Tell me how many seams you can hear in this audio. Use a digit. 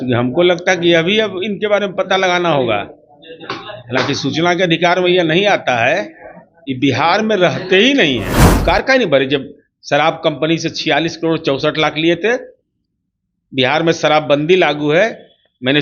1